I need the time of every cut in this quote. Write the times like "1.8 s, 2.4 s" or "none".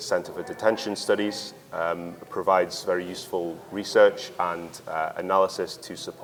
none